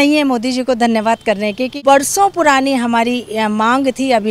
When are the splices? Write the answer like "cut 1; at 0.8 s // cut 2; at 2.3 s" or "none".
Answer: cut 1; at 1.7 s